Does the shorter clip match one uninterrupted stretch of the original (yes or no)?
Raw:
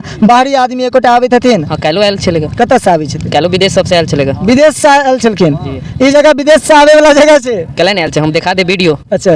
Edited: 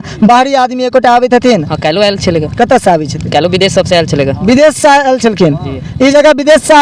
yes